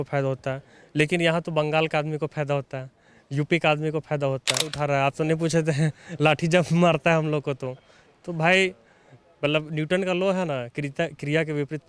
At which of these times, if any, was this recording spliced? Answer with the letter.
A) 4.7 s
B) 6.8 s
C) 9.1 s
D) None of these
A